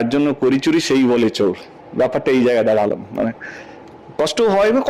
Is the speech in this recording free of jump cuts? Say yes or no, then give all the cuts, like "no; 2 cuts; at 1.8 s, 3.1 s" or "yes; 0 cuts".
yes; 0 cuts